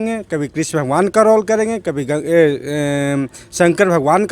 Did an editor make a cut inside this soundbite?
no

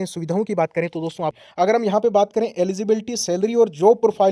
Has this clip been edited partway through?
yes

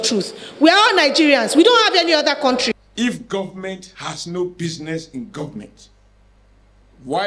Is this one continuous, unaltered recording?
no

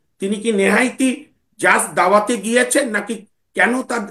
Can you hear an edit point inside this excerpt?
no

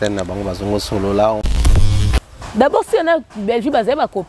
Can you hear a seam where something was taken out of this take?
yes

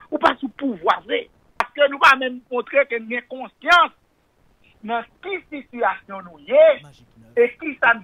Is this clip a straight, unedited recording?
no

